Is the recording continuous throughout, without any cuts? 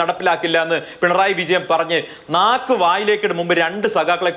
yes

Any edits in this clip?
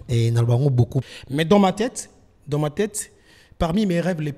yes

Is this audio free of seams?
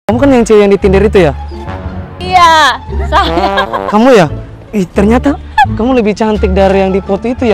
yes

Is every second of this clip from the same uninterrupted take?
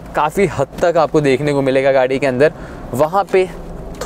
yes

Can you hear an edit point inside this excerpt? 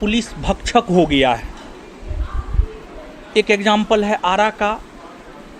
no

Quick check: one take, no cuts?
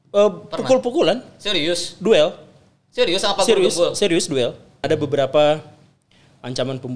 no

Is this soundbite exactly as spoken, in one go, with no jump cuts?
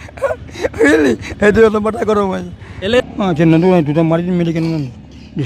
no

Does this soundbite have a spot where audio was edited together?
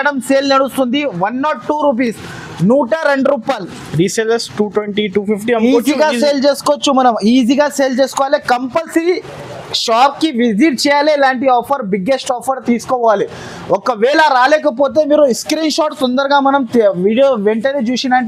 no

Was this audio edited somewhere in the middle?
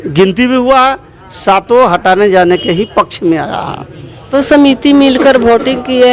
yes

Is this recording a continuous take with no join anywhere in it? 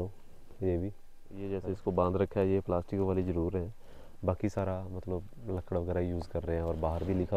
no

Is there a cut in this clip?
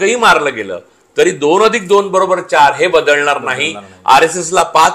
no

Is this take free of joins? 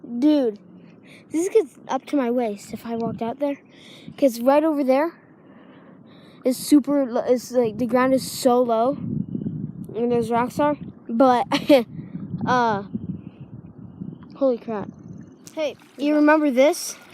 no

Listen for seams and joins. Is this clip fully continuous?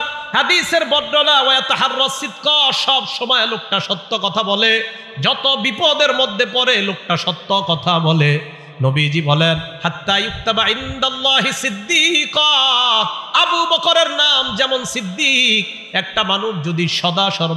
yes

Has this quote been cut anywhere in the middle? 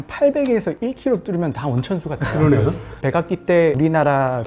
yes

